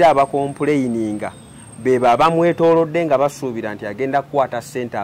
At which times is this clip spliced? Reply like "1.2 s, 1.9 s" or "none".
none